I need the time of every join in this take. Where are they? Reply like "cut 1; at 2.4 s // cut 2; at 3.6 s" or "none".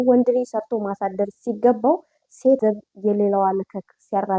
cut 1; at 2.6 s